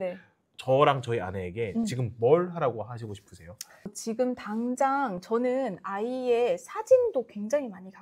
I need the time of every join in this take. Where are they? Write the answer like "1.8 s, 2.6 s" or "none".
3.9 s